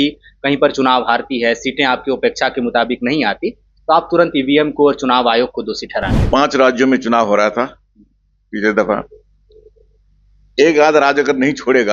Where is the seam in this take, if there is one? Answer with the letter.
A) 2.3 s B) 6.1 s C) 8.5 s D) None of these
B